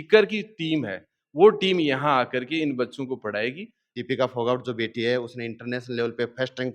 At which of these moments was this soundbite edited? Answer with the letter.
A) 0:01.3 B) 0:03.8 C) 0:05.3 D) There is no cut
B